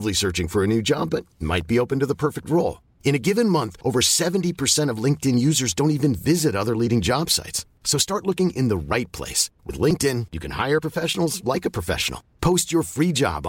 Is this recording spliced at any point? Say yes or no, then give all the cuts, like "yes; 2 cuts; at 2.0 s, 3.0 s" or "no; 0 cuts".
no; 0 cuts